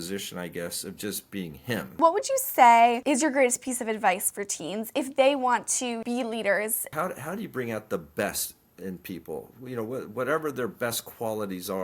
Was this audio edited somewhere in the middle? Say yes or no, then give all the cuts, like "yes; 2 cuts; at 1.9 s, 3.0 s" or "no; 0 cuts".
yes; 4 cuts; at 2.0 s, 3.0 s, 6.0 s, 6.9 s